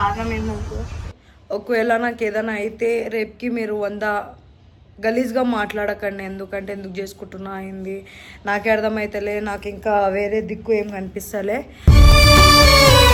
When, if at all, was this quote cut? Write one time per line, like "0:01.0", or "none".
none